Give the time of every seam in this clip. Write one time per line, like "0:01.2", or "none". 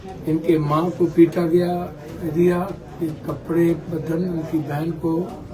none